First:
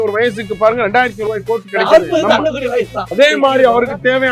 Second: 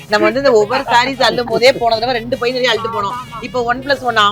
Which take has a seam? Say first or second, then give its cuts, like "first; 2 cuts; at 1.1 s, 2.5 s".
first; 1 cut; at 3.0 s